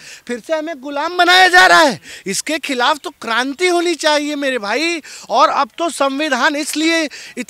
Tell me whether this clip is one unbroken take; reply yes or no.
yes